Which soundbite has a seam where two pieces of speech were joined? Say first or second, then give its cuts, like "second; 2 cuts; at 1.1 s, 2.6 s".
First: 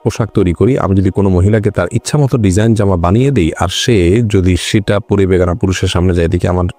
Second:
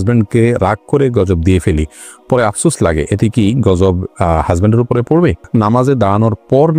second; 1 cut; at 5.5 s